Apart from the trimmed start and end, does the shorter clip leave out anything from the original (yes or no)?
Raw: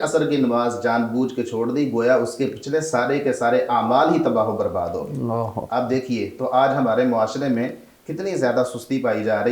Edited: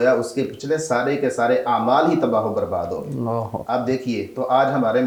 no